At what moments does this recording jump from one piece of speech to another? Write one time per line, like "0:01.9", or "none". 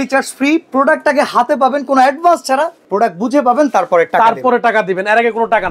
none